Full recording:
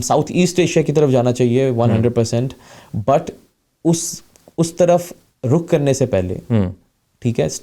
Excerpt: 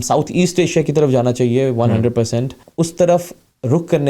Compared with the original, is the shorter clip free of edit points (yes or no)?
no